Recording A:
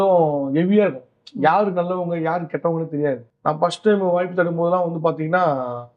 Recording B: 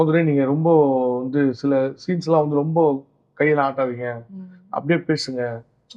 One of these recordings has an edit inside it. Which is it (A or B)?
A